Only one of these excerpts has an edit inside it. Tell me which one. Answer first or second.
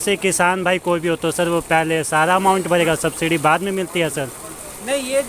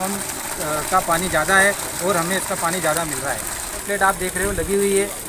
second